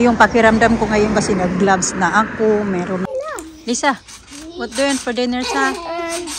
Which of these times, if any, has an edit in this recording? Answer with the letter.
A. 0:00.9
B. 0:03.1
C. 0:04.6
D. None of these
B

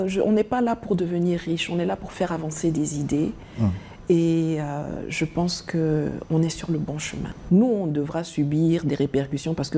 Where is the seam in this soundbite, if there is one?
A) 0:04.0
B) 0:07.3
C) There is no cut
B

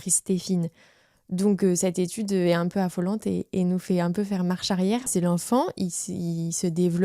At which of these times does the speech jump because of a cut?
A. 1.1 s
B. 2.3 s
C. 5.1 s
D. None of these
C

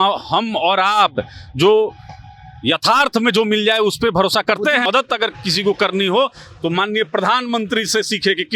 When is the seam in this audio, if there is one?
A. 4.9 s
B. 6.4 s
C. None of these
A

